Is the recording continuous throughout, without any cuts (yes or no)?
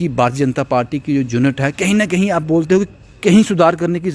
yes